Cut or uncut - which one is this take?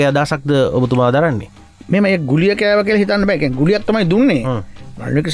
uncut